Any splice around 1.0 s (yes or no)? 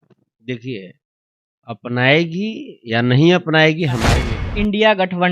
no